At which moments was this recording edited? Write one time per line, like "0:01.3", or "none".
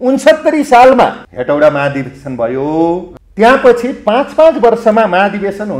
0:01.3
0:03.2